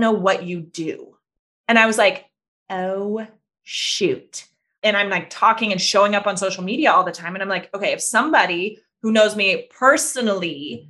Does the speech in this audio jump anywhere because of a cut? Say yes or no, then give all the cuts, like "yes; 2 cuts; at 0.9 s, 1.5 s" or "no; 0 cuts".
yes; 1 cut; at 4.8 s